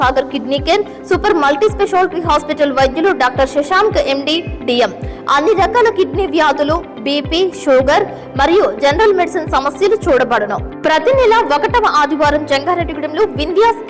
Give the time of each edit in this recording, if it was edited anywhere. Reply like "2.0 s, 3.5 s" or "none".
none